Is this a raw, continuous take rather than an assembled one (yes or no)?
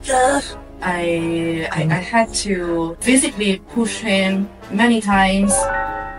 yes